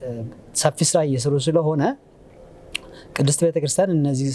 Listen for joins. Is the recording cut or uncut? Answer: uncut